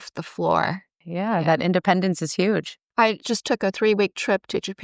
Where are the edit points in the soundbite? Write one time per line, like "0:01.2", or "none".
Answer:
0:01.0
0:02.8